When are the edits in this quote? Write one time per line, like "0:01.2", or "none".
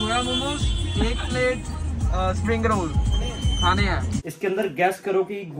0:04.2